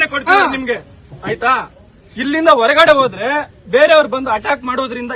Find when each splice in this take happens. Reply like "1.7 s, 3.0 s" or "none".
none